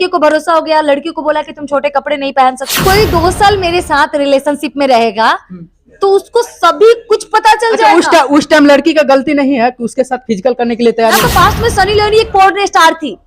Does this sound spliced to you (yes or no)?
yes